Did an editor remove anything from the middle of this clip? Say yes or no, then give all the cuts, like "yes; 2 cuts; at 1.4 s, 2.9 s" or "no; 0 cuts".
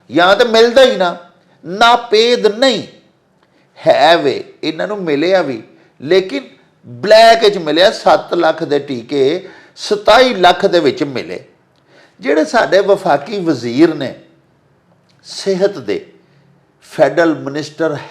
no; 0 cuts